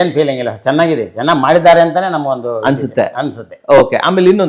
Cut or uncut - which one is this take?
uncut